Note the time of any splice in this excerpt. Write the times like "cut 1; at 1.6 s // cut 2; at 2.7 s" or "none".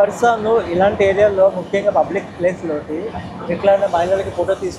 none